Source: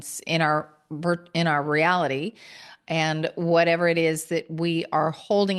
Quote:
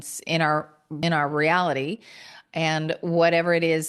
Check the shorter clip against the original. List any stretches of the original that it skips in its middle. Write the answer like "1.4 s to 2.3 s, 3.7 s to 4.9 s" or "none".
0.9 s to 1.3 s

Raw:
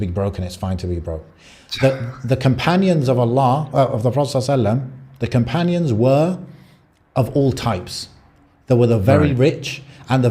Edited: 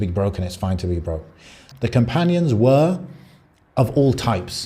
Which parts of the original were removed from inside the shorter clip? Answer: 1.6 s to 5.0 s

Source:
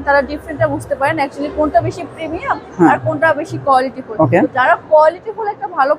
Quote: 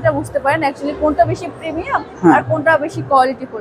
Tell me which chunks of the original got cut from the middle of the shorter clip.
none

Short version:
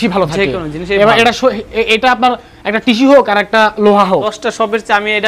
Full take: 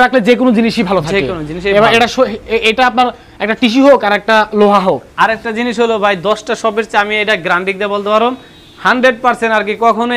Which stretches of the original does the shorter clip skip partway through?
5.1 s to 6.3 s

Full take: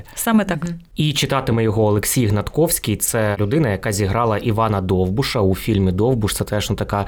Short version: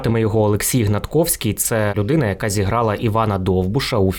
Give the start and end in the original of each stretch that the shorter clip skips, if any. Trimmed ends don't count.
none

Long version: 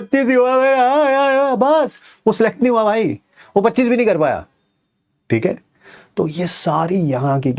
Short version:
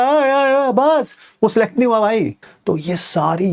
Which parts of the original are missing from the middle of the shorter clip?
3.3 s to 6.0 s

